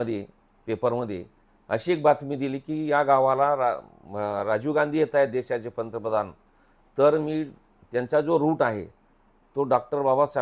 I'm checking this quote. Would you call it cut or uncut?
uncut